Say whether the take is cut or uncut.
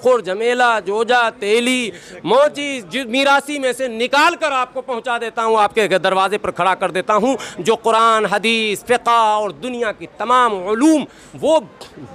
uncut